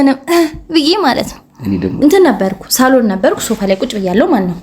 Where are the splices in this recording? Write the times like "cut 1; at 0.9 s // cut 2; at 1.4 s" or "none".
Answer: cut 1; at 2.0 s